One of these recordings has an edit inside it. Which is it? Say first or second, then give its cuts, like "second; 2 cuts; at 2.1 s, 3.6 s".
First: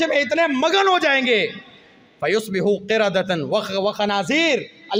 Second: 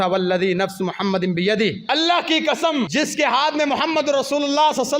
second; 2 cuts; at 1.8 s, 2.9 s